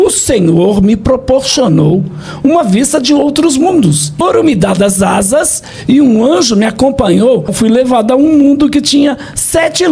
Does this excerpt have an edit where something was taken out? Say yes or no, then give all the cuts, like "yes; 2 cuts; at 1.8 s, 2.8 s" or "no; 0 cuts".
yes; 2 cuts; at 4.1 s, 7.5 s